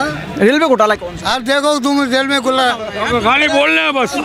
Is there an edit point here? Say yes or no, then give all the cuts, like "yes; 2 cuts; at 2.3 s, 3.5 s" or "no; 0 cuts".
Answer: no; 0 cuts